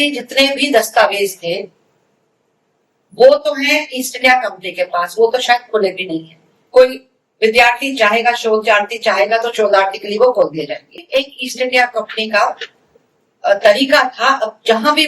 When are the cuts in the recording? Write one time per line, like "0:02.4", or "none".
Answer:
0:11.0